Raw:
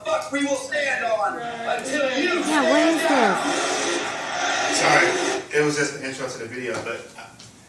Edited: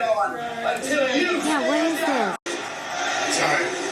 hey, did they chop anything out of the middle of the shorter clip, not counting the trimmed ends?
yes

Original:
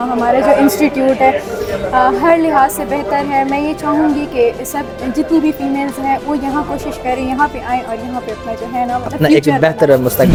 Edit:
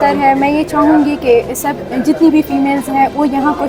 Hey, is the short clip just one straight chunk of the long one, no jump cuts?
yes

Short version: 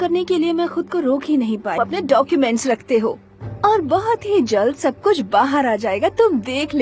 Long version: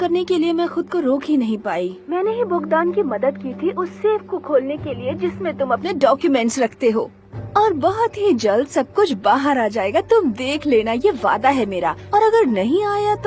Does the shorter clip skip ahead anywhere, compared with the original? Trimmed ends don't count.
yes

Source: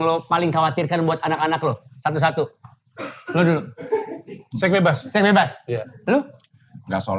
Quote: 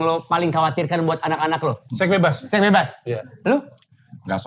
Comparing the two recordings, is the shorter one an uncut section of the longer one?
no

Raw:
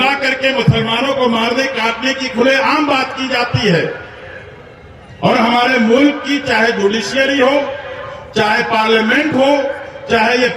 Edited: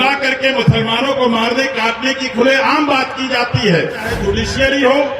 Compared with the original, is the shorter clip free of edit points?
no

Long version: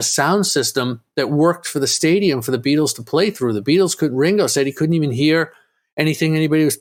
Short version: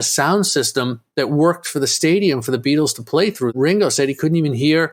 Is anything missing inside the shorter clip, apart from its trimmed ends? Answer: yes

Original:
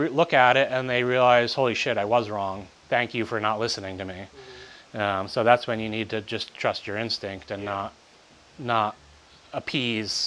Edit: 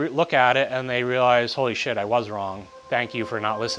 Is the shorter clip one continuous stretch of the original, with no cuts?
yes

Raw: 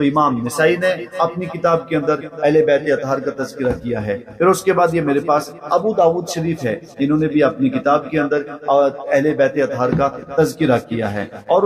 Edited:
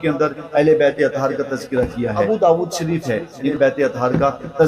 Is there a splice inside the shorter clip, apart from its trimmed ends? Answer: yes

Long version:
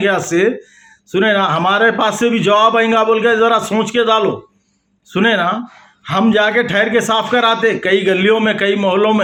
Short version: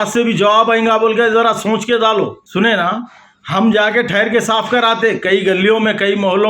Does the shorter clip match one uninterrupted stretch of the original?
no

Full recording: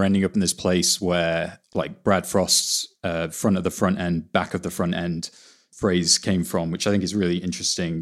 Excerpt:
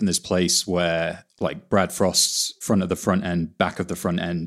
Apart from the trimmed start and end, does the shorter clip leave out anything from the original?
yes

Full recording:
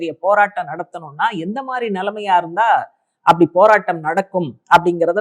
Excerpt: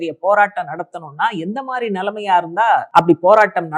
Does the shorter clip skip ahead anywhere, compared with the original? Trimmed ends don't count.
yes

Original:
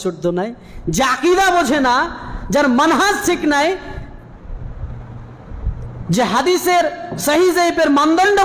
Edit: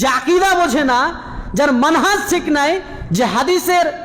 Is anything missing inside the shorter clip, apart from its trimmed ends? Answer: yes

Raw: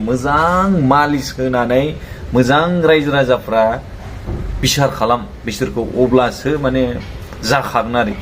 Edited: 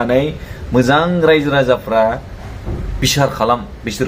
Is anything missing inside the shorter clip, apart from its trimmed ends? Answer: no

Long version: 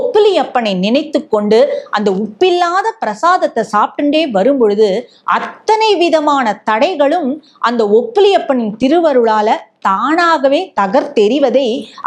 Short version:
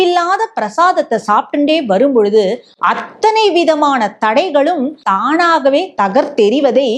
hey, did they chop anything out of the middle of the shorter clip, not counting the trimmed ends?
yes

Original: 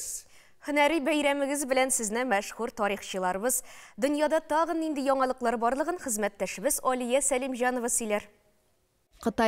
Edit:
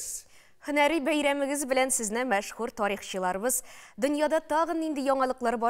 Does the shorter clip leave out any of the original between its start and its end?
no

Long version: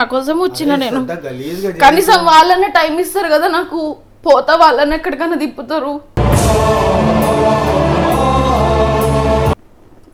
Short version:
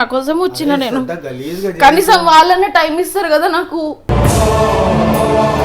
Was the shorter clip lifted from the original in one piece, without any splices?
no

